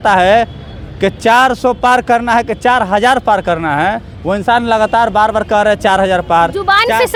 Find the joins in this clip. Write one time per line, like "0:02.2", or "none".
none